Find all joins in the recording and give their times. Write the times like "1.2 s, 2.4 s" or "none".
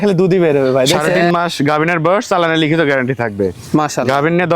1.1 s